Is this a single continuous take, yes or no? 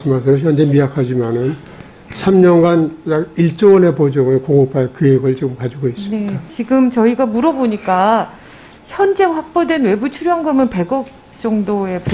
no